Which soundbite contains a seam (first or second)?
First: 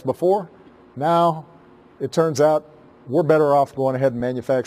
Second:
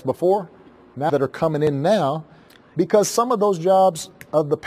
first